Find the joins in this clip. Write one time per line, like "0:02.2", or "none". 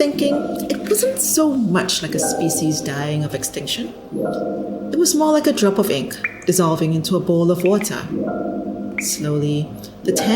0:04.0
0:04.9
0:08.0
0:09.2

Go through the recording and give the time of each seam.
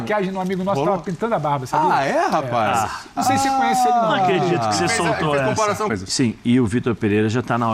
0:05.9

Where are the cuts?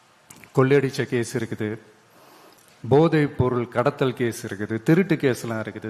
none

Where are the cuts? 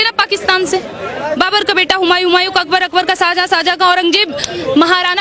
0:01.3

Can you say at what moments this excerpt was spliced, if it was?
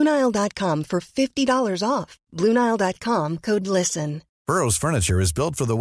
0:04.3

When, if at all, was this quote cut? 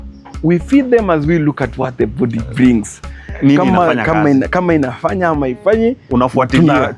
none

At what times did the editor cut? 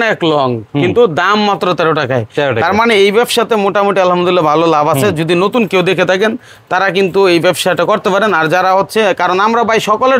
none

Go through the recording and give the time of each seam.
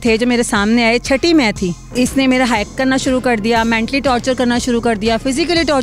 0:01.8

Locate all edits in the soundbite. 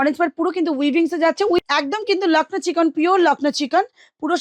0:01.6

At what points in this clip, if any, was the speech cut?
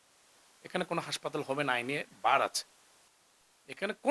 none

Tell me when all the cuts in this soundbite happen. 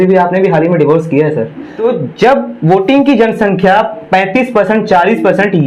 0:01.7

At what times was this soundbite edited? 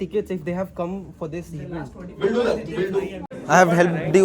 0:03.3

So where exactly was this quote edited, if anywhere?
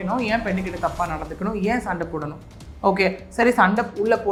none

